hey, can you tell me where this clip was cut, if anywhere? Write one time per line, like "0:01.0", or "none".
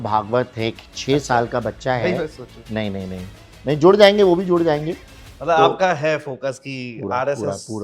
none